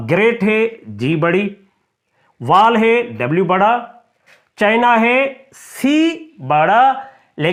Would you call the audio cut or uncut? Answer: uncut